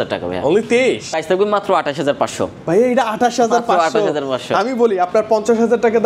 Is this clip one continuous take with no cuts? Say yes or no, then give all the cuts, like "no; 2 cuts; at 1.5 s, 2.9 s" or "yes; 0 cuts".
no; 1 cut; at 1.1 s